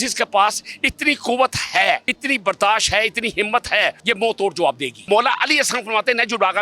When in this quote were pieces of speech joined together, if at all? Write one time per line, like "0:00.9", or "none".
0:02.1
0:04.0
0:05.0